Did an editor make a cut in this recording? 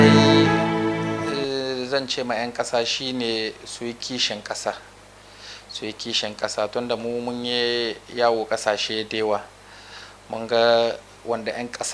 yes; 1 cut; at 0.9 s

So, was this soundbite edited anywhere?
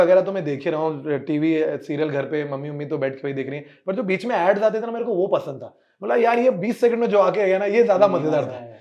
no; 0 cuts

